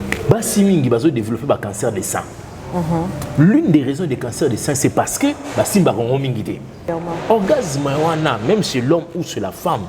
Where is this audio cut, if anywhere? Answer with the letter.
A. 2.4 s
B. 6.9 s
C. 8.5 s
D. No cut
B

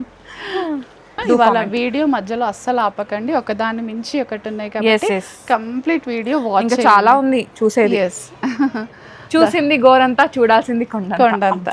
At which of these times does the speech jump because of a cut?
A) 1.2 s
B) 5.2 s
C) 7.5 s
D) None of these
A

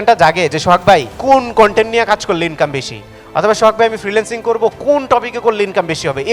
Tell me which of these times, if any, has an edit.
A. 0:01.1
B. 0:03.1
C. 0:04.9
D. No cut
A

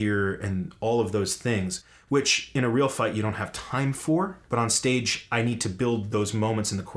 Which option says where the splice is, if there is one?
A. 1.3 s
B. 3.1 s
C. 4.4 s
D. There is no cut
C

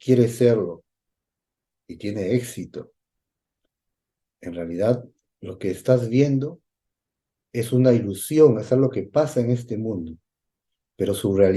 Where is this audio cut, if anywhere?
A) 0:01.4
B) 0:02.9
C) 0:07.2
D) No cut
D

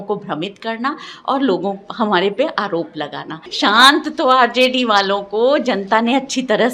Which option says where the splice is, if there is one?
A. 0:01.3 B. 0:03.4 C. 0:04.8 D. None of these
B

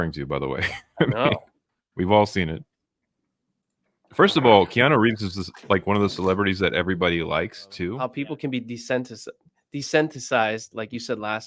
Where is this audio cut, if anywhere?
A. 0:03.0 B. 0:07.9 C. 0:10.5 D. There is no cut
B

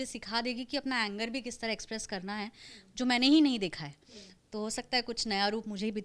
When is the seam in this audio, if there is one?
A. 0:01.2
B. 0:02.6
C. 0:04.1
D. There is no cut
D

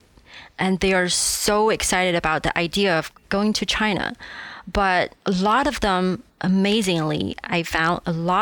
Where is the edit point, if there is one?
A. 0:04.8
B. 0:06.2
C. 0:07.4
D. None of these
D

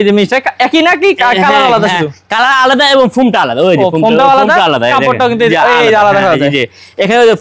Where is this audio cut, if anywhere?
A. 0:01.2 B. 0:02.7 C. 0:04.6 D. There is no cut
D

